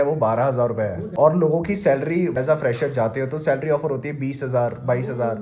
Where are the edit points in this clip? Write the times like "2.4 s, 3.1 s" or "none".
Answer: 1.1 s, 2.4 s